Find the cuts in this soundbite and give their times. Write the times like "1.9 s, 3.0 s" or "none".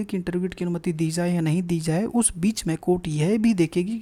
none

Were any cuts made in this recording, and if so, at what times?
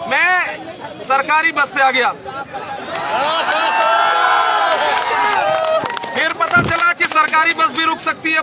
none

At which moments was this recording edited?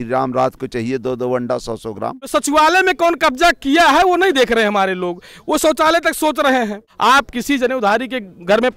2.2 s, 6.8 s

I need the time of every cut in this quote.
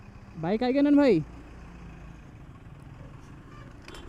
none

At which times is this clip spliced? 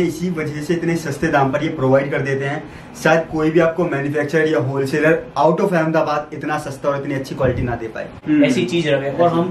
8.2 s

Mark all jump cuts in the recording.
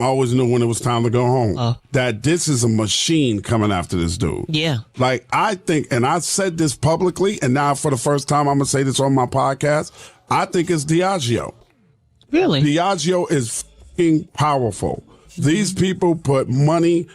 1.7 s

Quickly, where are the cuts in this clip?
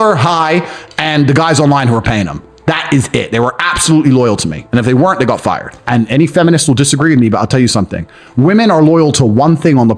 5.7 s

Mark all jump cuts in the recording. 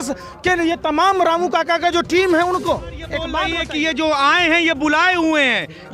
3.4 s

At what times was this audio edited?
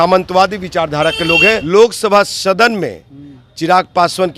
1.6 s

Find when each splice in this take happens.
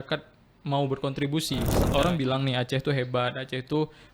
1.8 s

